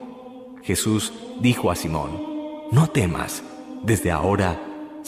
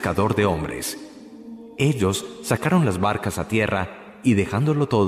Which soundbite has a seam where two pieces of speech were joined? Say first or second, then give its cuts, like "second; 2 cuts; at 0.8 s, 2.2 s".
second; 1 cut; at 1.1 s